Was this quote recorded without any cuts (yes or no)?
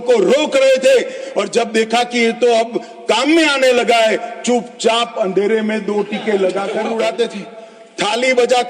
no